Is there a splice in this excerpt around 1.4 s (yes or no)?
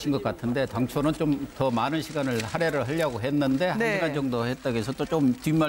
no